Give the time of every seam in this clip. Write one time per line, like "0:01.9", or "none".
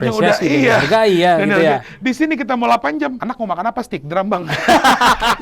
0:03.2